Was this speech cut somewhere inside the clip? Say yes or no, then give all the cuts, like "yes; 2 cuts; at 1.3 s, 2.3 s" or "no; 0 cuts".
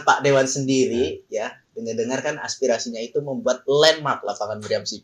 no; 0 cuts